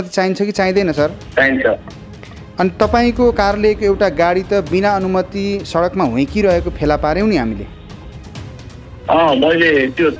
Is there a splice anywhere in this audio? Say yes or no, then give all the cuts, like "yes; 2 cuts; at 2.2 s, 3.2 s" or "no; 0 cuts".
yes; 1 cut; at 1.2 s